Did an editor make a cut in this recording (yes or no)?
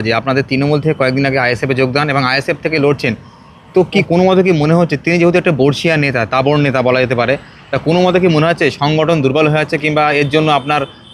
yes